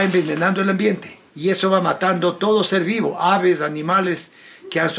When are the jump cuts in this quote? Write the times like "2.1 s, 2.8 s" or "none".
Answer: none

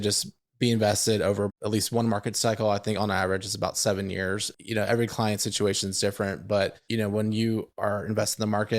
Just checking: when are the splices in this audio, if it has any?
1.5 s, 4.5 s, 6.8 s

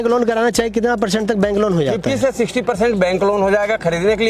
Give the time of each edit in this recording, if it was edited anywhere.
none

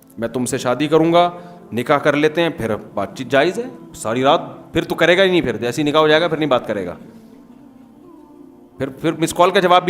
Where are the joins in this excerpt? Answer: 7.0 s, 8.6 s

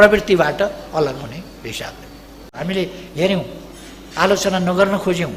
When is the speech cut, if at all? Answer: 2.6 s

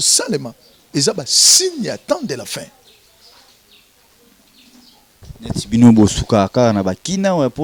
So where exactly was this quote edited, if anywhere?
5.2 s

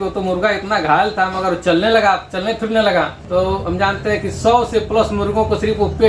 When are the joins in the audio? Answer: 3.2 s

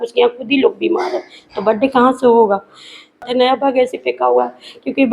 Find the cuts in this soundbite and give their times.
3.2 s

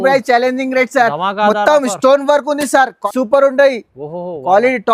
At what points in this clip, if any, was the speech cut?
3.0 s

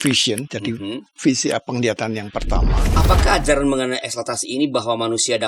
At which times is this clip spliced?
2.8 s

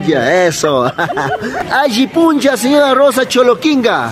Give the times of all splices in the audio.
1.6 s

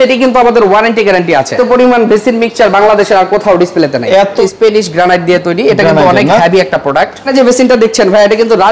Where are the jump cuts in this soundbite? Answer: 1.5 s, 4.4 s, 7.3 s

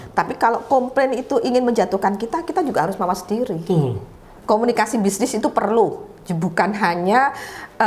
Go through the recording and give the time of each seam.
4.3 s

